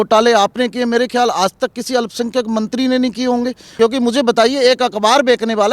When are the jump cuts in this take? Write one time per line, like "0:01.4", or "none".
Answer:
0:03.6